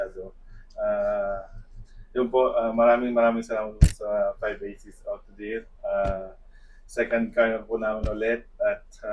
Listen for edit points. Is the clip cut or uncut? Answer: uncut